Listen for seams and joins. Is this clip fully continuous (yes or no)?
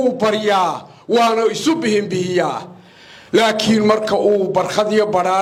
yes